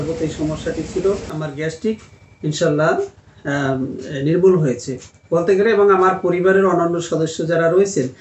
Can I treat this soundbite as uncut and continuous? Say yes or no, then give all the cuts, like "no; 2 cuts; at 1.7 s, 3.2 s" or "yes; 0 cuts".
no; 1 cut; at 1.5 s